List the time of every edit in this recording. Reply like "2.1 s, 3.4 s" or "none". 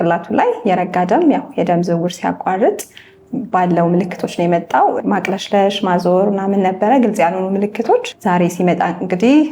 5.0 s, 8.1 s